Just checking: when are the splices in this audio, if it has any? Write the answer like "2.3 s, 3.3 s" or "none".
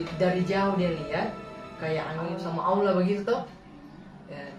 2.3 s